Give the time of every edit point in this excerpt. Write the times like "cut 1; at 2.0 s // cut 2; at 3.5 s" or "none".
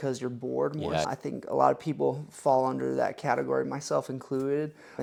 none